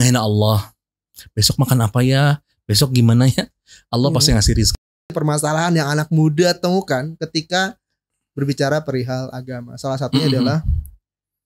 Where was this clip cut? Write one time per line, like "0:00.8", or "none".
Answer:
0:05.1